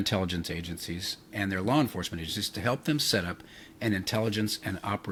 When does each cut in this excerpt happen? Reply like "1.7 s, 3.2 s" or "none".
none